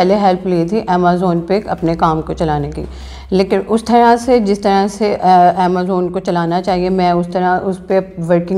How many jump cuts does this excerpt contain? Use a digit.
0